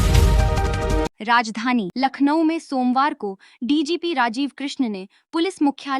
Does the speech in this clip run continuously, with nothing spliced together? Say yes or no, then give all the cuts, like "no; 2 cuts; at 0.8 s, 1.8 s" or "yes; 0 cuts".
no; 1 cut; at 1.2 s